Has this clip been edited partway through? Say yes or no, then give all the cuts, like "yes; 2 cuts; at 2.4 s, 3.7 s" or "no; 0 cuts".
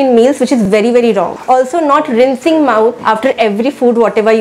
yes; 2 cuts; at 1.4 s, 3.0 s